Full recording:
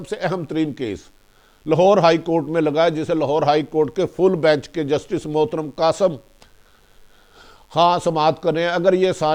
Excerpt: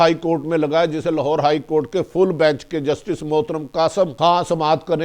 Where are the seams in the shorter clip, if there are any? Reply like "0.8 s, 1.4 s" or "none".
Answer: 4.1 s